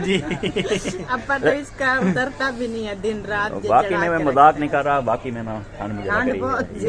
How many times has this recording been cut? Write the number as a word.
zero